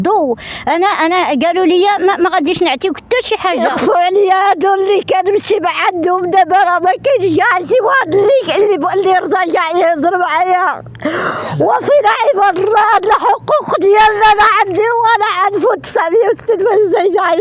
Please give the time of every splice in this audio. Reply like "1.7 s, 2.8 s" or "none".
3.6 s